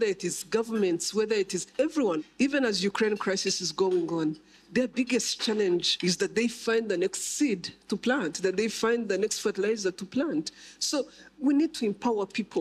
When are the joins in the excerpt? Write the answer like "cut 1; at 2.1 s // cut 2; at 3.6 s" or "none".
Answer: cut 1; at 2.2 s // cut 2; at 5.9 s // cut 3; at 11.4 s